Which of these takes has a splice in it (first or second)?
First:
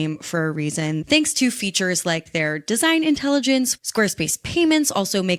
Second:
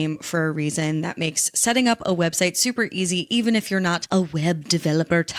first